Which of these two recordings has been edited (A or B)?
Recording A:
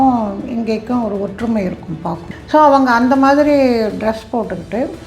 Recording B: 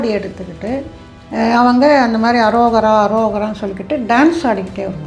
A